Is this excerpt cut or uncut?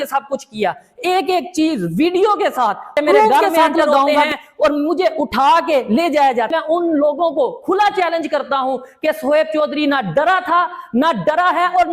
cut